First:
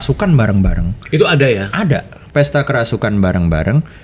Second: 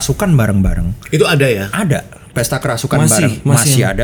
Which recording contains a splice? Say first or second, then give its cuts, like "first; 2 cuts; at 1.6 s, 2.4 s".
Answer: first; 1 cut; at 2.1 s